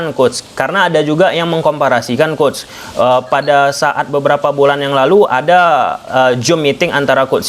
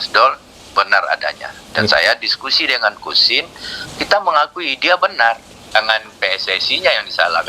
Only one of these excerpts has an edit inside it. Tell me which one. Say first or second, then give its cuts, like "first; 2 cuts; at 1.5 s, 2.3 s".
second; 1 cut; at 5.5 s